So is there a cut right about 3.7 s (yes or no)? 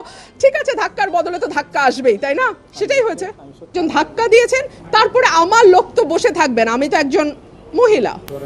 yes